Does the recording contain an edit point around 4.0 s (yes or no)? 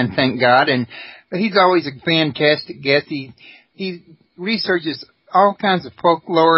yes